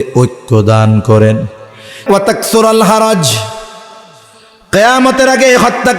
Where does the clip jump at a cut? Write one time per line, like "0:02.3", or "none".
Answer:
0:02.0